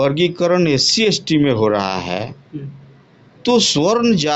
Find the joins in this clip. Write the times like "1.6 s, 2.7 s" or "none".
none